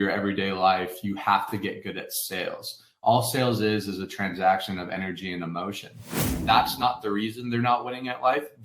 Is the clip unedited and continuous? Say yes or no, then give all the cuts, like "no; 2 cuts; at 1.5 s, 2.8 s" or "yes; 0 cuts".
no; 1 cut; at 6.2 s